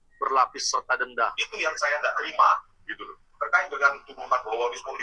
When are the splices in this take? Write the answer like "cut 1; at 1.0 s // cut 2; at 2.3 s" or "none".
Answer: cut 1; at 1.5 s